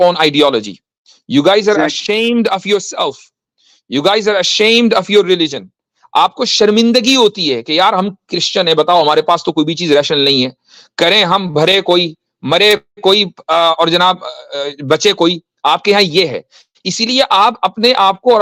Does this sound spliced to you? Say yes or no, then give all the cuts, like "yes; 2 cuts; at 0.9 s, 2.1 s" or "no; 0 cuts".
no; 0 cuts